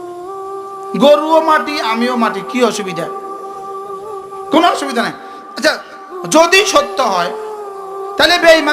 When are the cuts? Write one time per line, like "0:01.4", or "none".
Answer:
0:00.9